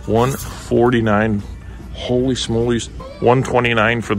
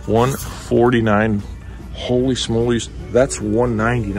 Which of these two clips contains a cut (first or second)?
first